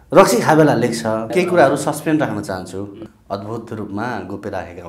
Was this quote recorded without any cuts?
no; 2 cuts; at 1.3 s, 3.0 s

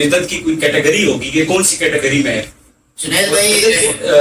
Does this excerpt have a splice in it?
no; 0 cuts

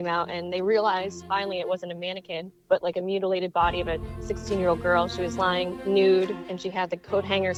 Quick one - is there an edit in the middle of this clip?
no; 0 cuts

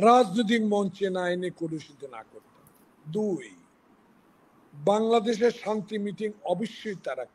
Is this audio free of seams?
yes; 0 cuts

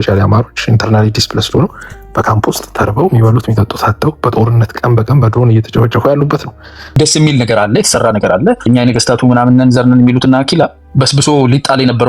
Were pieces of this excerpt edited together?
yes; 3 cuts; at 7.0 s, 8.7 s, 10.8 s

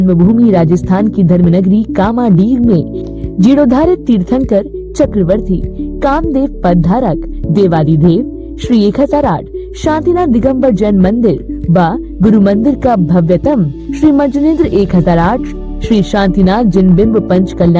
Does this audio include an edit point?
yes; 1 cut; at 2.3 s

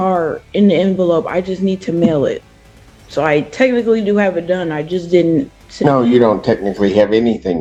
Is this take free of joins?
yes; 0 cuts

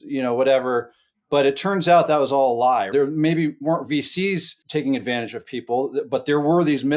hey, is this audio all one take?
no; 2 cuts; at 2.9 s, 4.6 s

